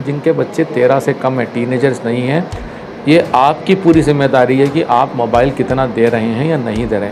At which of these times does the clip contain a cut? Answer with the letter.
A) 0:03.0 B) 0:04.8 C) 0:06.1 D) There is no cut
D